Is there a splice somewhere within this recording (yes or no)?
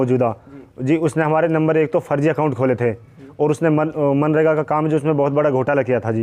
no